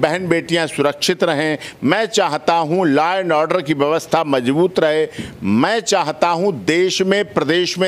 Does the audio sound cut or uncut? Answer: uncut